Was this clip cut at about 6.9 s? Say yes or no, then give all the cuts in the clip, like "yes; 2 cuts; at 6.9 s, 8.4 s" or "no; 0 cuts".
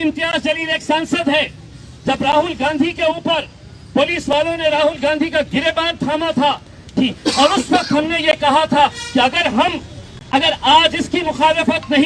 yes; 1 cut; at 6.9 s